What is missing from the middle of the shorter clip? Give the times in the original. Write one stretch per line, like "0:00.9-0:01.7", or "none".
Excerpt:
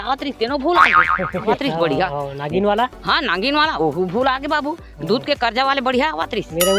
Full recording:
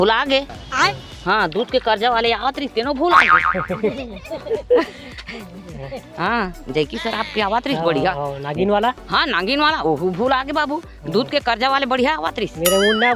0:03.9-0:07.6

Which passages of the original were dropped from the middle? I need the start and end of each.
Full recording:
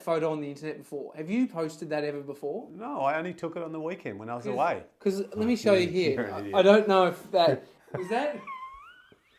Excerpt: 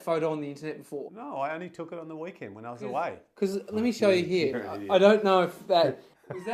0:01.1-0:02.8

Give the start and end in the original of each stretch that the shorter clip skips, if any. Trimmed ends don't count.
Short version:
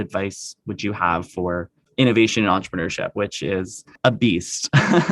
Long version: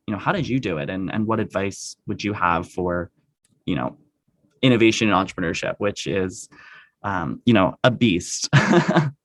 0:03.2-0:04.4
0:06.6-0:07.8

